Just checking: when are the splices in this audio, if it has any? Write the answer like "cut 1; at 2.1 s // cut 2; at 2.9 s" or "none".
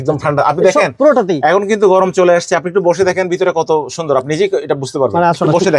none